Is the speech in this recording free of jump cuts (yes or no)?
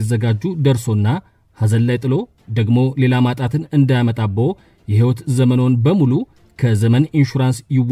yes